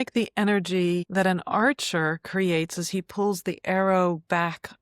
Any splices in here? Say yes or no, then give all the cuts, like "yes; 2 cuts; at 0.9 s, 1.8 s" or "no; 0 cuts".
yes; 1 cut; at 1.1 s